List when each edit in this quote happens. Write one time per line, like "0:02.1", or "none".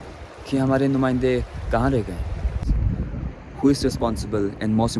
0:02.7